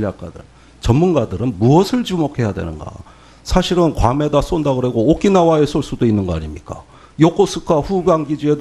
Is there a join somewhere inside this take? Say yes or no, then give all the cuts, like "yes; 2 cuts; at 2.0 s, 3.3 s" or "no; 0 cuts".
no; 0 cuts